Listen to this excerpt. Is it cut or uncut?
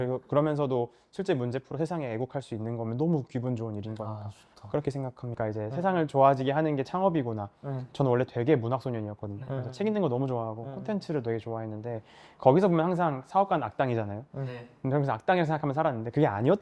cut